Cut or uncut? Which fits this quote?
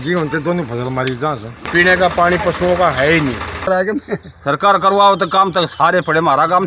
cut